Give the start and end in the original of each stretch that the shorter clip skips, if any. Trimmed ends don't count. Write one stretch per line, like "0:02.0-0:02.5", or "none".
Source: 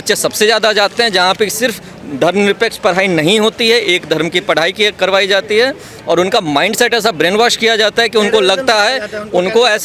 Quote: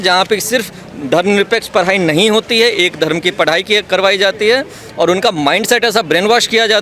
none